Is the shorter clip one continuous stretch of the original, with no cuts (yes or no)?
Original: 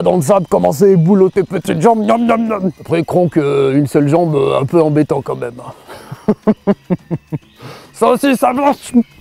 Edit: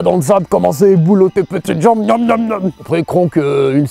yes